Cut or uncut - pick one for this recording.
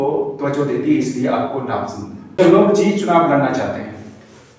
cut